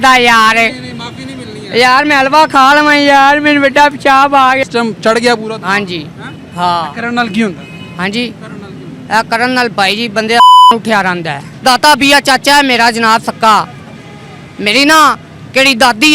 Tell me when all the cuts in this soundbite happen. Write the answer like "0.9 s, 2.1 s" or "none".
4.6 s, 11.5 s